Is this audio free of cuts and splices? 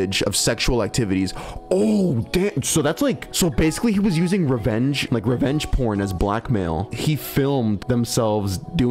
yes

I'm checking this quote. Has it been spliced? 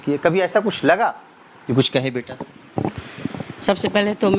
no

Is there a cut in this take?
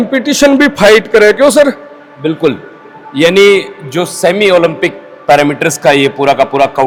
no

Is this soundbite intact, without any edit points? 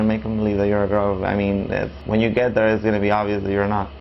no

